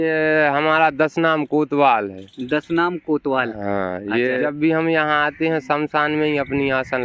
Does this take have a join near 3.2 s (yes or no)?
no